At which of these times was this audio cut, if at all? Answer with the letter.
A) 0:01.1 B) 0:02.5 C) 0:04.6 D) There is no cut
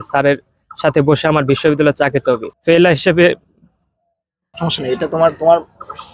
B